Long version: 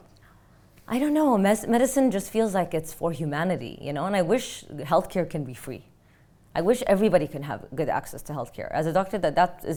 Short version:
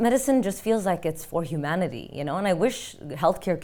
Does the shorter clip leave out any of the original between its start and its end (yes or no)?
no